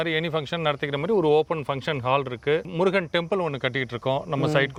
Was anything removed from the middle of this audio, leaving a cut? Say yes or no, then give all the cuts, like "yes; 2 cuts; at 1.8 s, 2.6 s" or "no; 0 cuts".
no; 0 cuts